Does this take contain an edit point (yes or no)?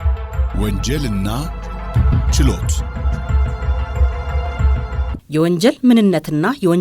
no